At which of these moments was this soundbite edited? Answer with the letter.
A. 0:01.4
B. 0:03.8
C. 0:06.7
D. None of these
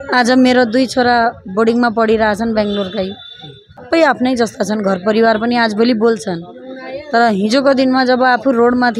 B